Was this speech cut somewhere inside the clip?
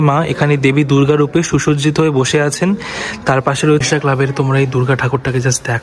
yes; 1 cut; at 3.8 s

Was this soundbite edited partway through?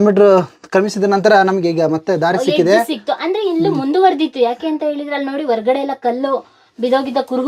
no; 0 cuts

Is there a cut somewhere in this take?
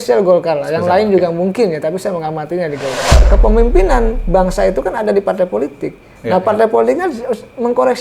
yes; 1 cut; at 3.2 s

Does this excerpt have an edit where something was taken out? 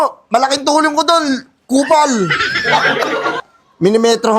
yes; 1 cut; at 3.5 s

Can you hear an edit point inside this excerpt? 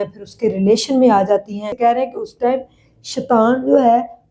yes; 1 cut; at 1.7 s

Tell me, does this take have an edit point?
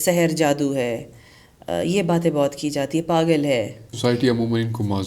yes; 1 cut; at 3.9 s

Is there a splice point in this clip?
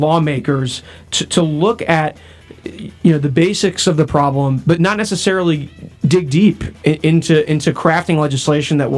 no; 0 cuts

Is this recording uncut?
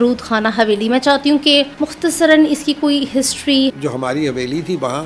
no; 2 cuts; at 1.7 s, 3.7 s

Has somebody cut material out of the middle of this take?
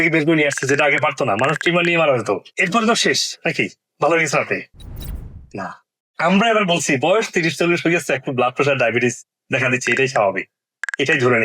yes; 2 cuts; at 2.6 s, 6.1 s

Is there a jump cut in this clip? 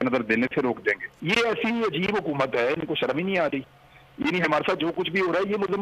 yes; 1 cut; at 1.1 s

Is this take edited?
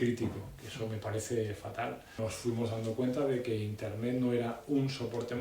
yes; 1 cut; at 2.1 s

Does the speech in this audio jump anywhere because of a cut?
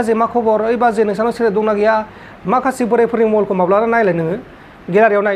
yes; 1 cut; at 2.2 s

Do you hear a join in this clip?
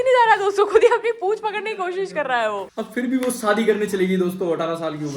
yes; 1 cut; at 2.7 s

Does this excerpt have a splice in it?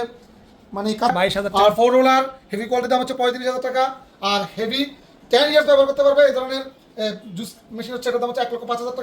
yes; 1 cut; at 1.1 s

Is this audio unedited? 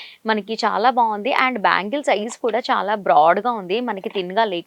yes; 0 cuts

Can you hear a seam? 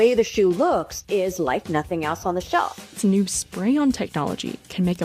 yes; 1 cut; at 3.0 s

